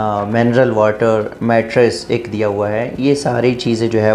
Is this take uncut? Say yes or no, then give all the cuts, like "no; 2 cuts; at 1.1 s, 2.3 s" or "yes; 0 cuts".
yes; 0 cuts